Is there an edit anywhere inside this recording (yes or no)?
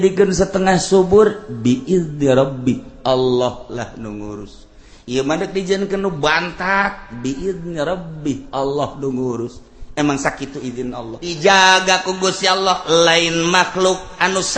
yes